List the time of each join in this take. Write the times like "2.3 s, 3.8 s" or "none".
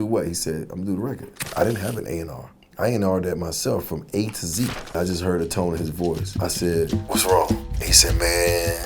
1.5 s, 4.9 s